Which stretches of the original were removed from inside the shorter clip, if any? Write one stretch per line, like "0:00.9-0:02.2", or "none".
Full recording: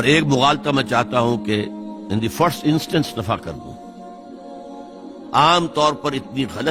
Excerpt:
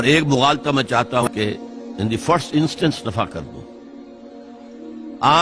0:01.2-0:01.3